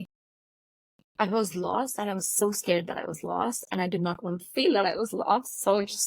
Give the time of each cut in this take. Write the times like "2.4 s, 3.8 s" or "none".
none